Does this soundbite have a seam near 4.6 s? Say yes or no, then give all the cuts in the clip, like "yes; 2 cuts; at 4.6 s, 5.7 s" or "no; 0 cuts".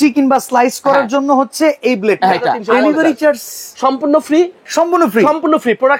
yes; 2 cuts; at 2.6 s, 4.6 s